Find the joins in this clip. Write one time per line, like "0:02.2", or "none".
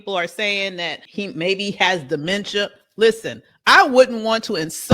0:01.0